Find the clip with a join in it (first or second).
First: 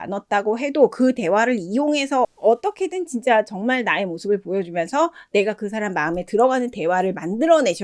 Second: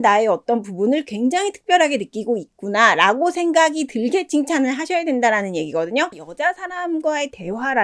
second